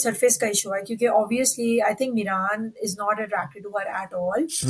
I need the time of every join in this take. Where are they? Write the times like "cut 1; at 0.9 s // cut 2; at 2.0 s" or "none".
none